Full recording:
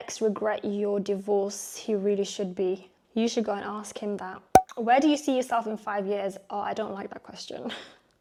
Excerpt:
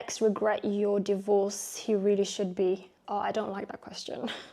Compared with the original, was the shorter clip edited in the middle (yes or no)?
yes